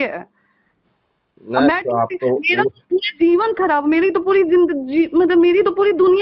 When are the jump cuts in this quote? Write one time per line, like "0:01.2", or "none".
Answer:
none